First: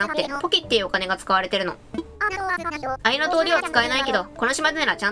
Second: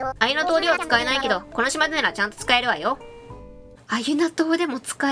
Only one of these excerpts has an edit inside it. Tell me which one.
first; 1 cut; at 1.8 s

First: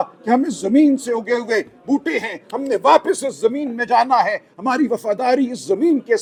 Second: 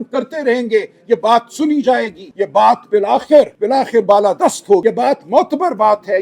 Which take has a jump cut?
second; 3 cuts; at 2.2 s, 3.6 s, 4.8 s

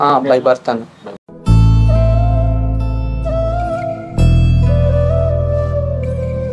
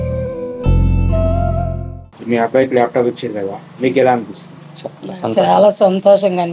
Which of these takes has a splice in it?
second; 1 cut; at 2.0 s

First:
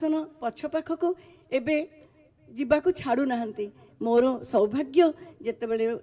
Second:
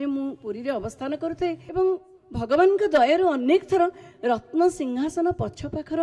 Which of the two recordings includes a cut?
second; 1 cut; at 1.6 s

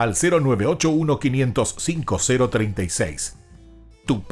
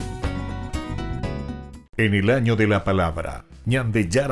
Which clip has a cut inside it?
second; 1 cut; at 1.8 s

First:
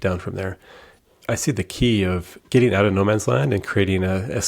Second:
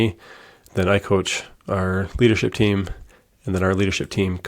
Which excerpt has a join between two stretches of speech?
first; 2 cuts; at 0.9 s, 2.4 s

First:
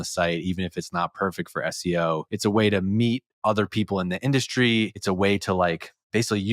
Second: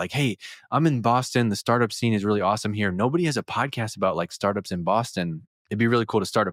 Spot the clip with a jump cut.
first; 2 cuts; at 2.3 s, 5.0 s

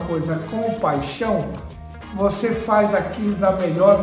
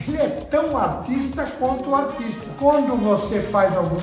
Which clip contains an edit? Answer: second; 1 cut; at 2.5 s

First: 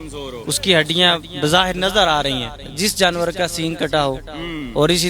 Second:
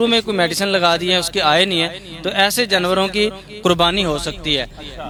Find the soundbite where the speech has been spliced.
first; 1 cut; at 2.7 s

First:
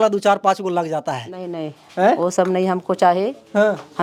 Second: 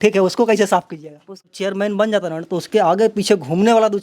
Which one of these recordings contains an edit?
second; 1 cut; at 1.5 s

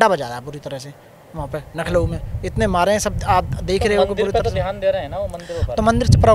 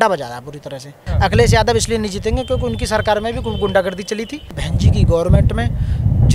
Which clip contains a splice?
second; 2 cuts; at 1.0 s, 4.6 s

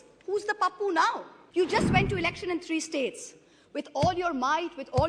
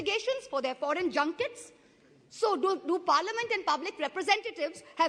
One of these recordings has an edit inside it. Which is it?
first; 1 cut; at 1.3 s

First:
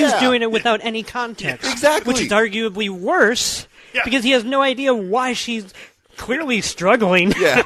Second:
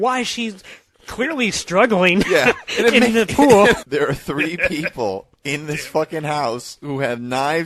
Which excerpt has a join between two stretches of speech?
second; 1 cut; at 3.8 s

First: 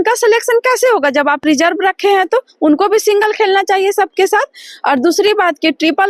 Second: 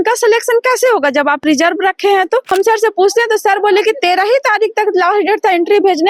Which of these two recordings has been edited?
second; 1 cut; at 2.5 s

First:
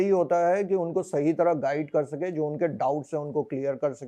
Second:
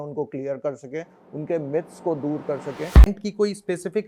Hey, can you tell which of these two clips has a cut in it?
second; 1 cut; at 3.1 s

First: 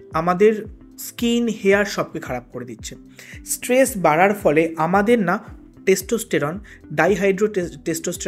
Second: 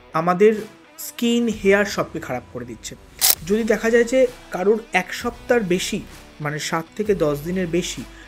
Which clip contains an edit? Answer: second; 1 cut; at 3.3 s

